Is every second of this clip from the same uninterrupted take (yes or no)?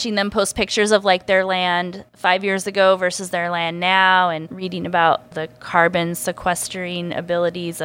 no